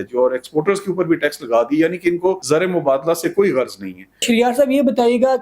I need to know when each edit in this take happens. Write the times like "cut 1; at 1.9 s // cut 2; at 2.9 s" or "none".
cut 1; at 2.4 s // cut 2; at 4.2 s